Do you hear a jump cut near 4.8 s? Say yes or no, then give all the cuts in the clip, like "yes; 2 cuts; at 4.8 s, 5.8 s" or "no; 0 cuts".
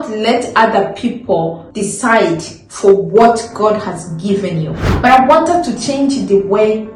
yes; 2 cuts; at 1.6 s, 4.8 s